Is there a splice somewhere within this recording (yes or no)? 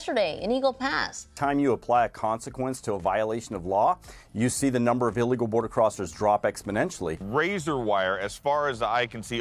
yes